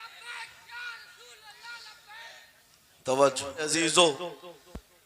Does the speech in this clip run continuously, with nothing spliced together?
no; 1 cut; at 3.7 s

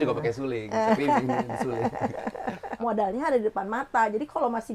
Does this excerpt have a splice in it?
yes; 1 cut; at 2.7 s

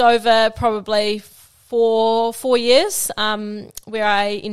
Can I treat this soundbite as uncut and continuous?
yes; 0 cuts

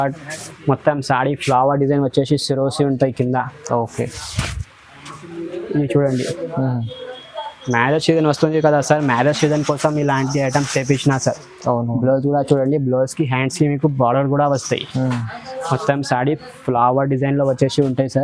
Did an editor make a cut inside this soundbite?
no; 0 cuts

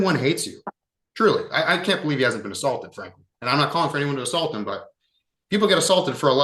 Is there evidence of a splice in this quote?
no; 0 cuts

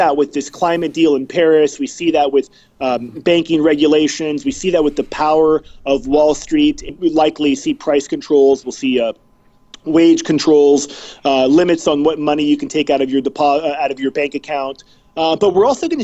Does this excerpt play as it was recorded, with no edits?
no; 1 cut; at 6.9 s

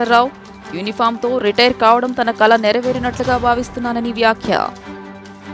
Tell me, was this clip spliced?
no; 0 cuts

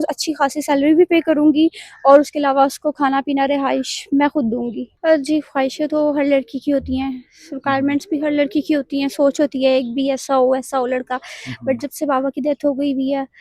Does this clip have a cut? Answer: yes; 1 cut; at 4.9 s

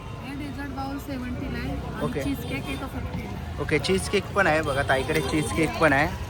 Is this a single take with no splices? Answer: yes; 0 cuts

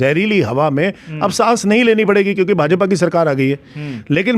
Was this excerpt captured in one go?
yes; 0 cuts

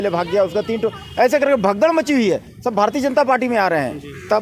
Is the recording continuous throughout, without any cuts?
yes; 0 cuts

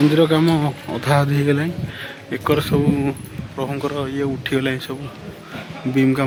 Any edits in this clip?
no; 0 cuts

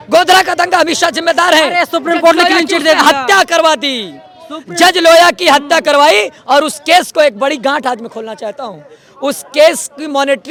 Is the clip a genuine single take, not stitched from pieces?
yes; 0 cuts

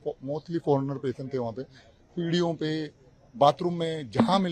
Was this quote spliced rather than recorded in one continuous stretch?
no; 0 cuts

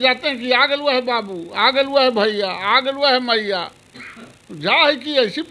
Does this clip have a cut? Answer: no; 0 cuts

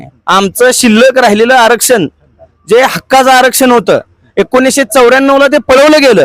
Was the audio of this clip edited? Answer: no; 0 cuts

